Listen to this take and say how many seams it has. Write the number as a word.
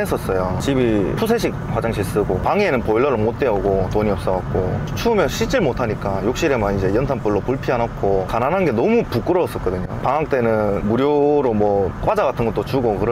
zero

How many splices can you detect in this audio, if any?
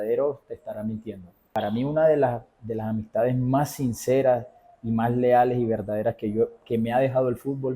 one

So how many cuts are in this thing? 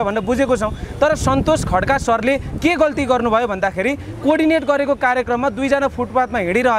zero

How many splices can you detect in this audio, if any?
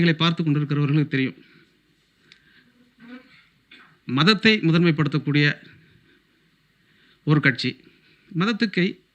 zero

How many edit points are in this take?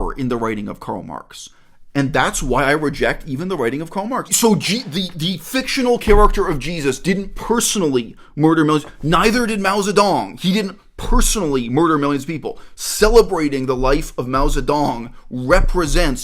one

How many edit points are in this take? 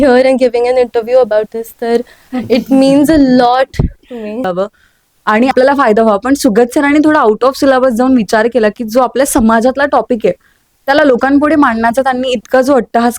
one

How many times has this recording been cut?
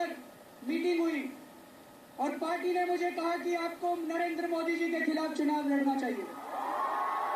one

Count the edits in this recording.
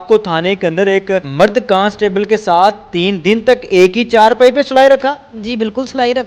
one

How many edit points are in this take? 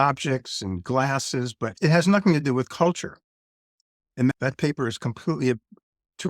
two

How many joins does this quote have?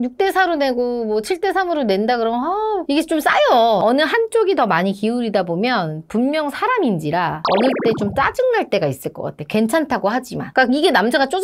two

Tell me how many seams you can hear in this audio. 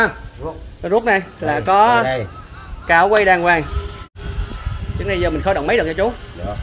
one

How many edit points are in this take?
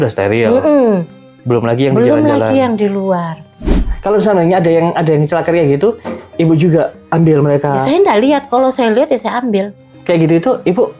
two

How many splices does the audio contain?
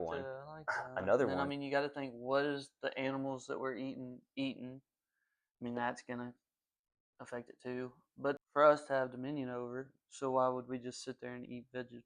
two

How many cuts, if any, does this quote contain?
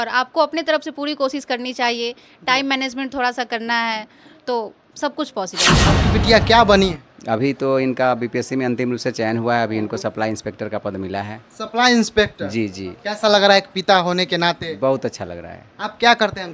one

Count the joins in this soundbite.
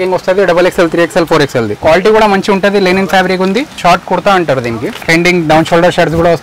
two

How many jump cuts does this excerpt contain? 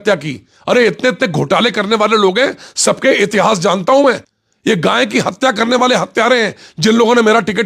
one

